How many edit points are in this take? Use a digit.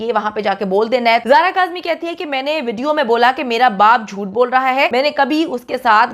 2